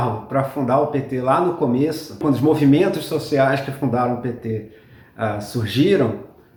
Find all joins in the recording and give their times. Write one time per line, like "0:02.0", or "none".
none